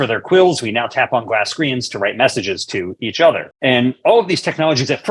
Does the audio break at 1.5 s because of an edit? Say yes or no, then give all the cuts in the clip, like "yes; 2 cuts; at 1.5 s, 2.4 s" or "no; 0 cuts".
no; 1 cut; at 3.5 s